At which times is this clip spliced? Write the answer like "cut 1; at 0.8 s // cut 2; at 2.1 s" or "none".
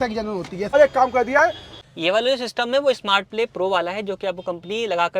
cut 1; at 0.7 s // cut 2; at 1.8 s